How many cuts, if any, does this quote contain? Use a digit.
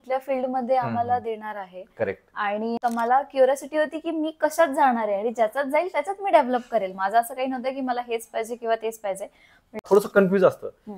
2